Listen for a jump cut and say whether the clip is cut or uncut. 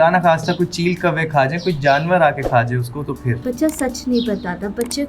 cut